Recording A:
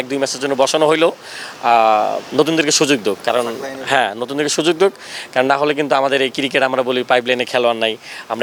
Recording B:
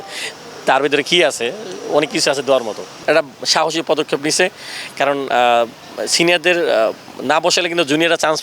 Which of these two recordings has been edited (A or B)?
B